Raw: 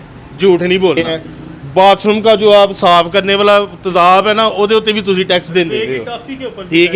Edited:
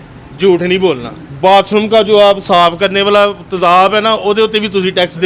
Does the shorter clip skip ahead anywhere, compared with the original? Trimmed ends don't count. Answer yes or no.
yes